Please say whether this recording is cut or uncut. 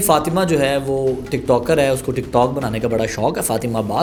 uncut